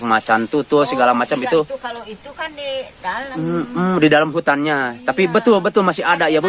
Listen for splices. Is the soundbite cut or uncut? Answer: uncut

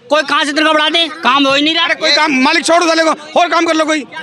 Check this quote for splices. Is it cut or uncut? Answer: uncut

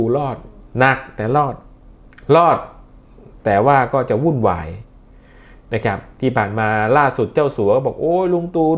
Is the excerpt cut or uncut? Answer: uncut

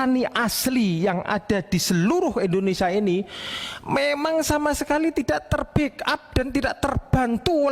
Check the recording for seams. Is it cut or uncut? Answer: uncut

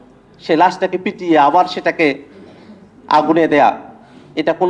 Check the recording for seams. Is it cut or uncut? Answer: uncut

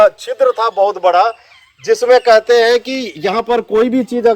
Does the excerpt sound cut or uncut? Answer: uncut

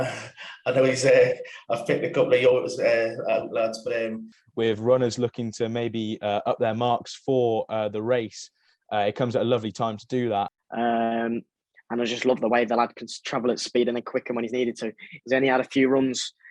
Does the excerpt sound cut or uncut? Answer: cut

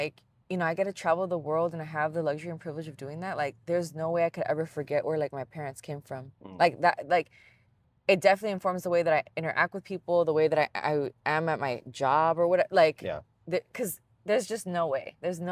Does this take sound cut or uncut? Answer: uncut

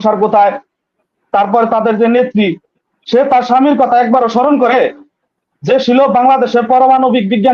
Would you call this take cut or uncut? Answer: uncut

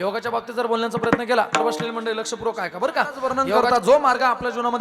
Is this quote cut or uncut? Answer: cut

